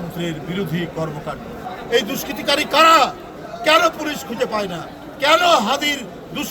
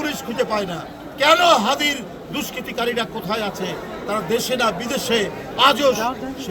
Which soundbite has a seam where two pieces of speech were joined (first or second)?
first